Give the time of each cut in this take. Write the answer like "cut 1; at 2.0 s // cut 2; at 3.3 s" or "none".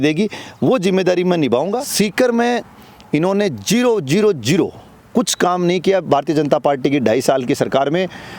cut 1; at 1.8 s